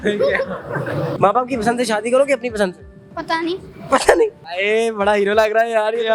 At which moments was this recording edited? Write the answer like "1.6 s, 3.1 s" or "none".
1.1 s, 4.5 s